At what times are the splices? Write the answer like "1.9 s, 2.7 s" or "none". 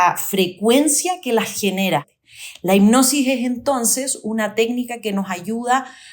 2.0 s